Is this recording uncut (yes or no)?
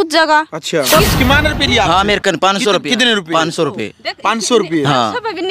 no